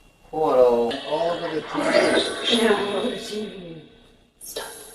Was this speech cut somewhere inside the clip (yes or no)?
yes